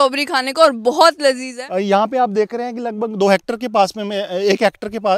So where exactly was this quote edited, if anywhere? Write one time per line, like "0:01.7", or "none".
0:01.5